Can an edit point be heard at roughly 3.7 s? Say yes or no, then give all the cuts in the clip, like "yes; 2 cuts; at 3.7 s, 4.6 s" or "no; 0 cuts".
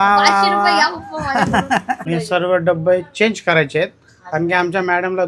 no; 1 cut; at 2.0 s